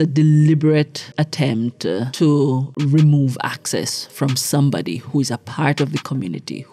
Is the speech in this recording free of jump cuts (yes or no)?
no